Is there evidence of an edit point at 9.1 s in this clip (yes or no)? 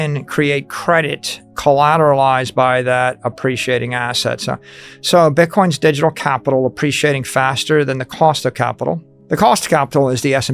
yes